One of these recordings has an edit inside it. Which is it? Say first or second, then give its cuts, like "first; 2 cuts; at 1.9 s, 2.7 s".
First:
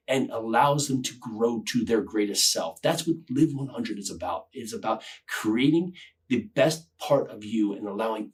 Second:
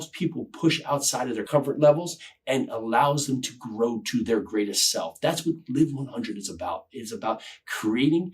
second; 1 cut; at 1.4 s